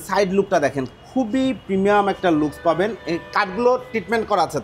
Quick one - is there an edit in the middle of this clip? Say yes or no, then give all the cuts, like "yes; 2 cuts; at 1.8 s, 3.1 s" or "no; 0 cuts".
no; 0 cuts